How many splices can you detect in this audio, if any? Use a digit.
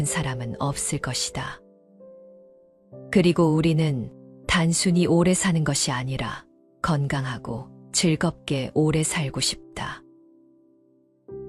0